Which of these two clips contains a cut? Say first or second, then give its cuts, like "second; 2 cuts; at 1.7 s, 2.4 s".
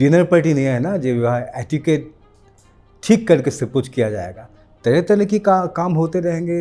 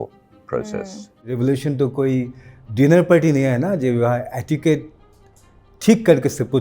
second; 1 cut; at 1.3 s